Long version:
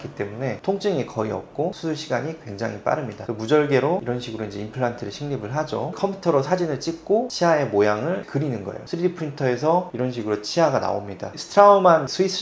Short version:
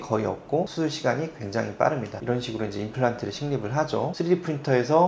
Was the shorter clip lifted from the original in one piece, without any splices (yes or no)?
no